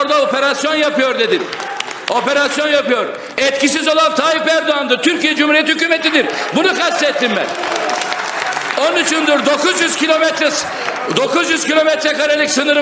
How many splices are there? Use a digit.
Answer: 0